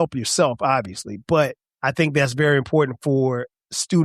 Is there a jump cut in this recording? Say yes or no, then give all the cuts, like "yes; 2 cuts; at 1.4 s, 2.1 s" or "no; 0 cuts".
yes; 1 cut; at 1.7 s